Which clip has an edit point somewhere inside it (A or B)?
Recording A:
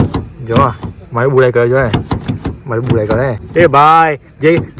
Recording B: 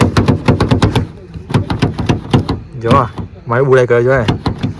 A